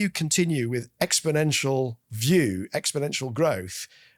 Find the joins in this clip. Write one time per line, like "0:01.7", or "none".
none